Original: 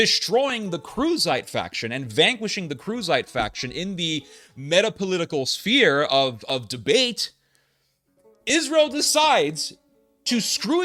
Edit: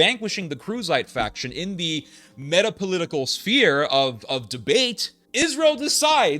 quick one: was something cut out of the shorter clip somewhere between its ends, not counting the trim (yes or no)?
yes